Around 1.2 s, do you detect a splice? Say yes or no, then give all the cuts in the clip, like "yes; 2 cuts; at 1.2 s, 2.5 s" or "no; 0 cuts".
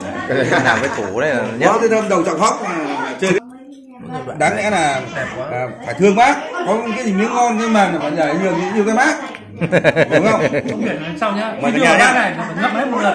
no; 1 cut; at 3.4 s